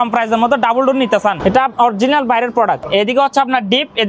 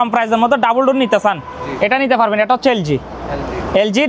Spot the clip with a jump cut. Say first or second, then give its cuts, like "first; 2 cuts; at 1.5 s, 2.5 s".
first; 2 cuts; at 1.4 s, 2.9 s